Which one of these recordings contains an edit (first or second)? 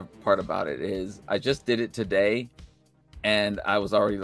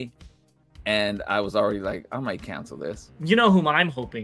second